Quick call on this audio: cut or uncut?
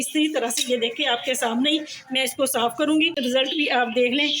cut